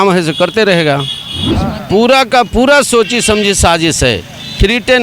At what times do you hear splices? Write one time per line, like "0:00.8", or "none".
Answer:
0:01.4